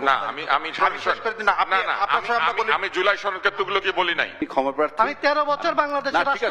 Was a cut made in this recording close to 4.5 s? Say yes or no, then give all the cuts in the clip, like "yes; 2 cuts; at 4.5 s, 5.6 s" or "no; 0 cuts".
yes; 1 cut; at 4.5 s